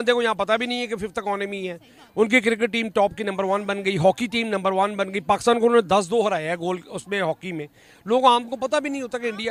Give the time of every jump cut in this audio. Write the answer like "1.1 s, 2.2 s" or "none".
none